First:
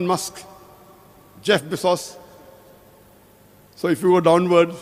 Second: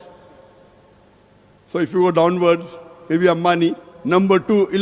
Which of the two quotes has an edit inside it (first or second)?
second